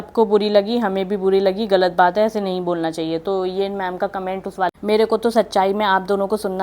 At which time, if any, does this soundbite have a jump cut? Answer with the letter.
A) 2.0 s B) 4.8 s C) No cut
B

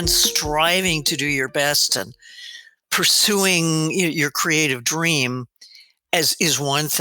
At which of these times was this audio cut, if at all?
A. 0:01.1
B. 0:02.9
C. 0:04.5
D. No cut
B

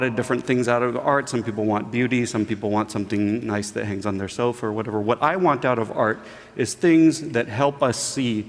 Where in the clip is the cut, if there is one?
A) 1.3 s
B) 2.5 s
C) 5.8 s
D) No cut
A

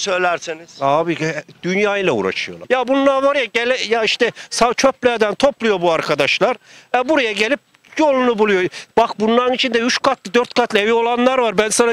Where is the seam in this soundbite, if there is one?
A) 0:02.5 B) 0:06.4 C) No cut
A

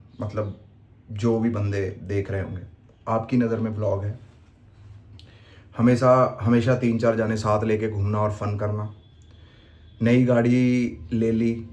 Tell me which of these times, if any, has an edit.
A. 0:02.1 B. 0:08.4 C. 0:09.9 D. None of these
D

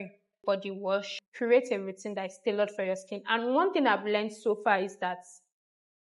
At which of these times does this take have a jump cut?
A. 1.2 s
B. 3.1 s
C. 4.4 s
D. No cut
A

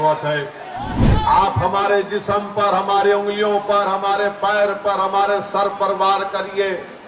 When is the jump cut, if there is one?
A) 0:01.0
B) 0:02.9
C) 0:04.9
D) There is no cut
A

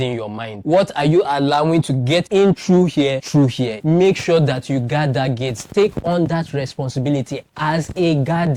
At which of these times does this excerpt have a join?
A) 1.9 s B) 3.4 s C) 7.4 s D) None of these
D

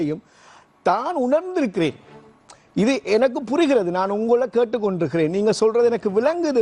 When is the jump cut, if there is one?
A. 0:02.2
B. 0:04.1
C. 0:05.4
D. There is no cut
D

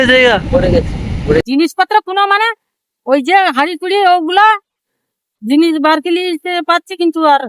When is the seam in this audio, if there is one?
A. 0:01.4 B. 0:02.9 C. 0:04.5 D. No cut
A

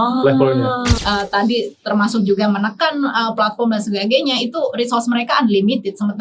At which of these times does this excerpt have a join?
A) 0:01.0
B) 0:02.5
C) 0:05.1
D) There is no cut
A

